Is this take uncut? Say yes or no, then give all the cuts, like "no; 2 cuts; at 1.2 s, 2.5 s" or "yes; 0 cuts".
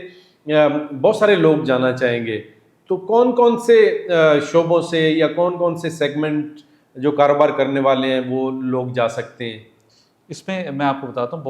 yes; 0 cuts